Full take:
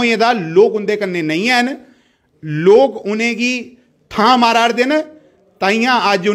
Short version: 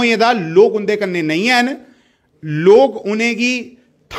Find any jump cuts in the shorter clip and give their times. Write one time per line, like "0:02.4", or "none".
none